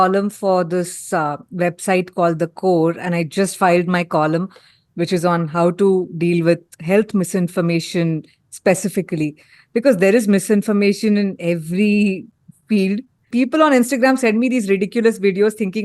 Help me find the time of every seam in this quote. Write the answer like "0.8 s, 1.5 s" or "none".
13.3 s